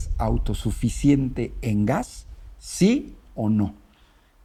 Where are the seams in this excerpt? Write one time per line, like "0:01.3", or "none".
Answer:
none